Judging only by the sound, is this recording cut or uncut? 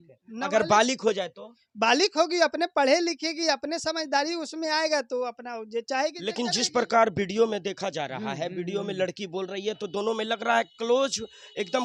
uncut